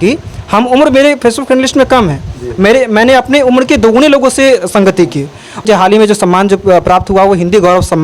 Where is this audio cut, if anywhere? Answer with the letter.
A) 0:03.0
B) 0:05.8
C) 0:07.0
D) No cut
B